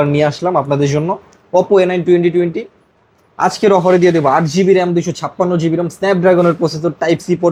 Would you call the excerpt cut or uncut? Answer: uncut